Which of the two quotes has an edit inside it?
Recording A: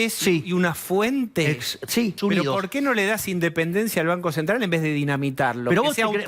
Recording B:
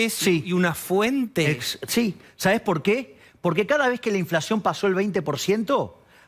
A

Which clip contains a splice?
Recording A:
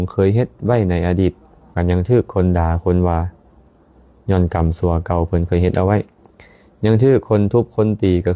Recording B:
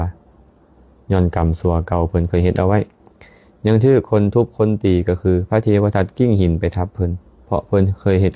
A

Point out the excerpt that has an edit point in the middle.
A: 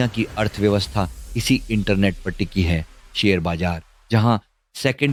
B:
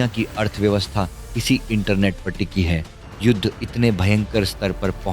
B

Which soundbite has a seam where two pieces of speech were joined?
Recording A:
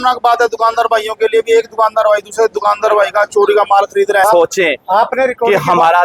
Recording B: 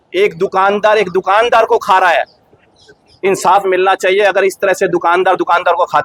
A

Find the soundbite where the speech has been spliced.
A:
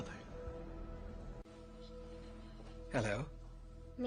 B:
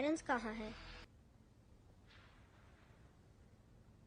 B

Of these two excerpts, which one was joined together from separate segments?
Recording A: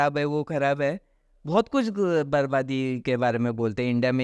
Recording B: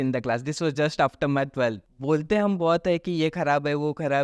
B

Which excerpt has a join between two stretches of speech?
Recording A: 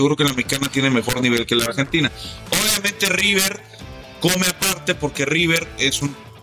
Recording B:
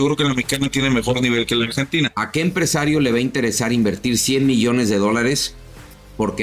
B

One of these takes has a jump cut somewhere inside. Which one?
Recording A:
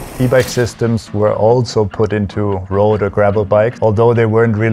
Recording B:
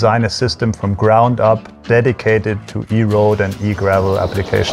A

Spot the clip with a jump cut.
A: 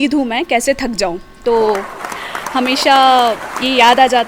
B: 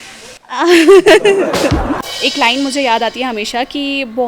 B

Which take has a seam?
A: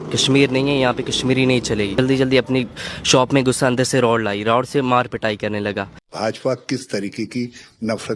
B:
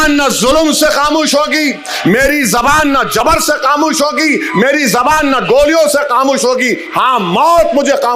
A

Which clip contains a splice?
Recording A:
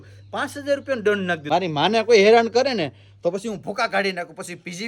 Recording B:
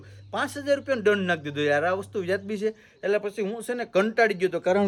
A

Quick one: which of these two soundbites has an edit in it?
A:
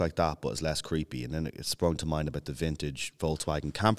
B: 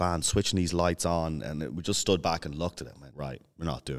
B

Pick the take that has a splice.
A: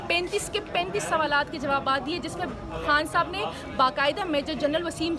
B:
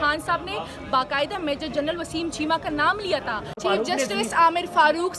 B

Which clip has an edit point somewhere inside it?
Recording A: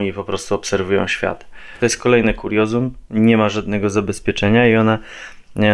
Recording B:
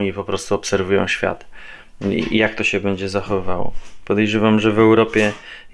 A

